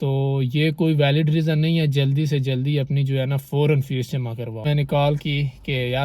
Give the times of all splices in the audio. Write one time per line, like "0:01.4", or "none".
0:04.7